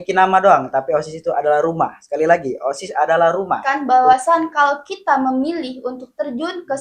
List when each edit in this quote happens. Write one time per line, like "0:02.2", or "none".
0:03.6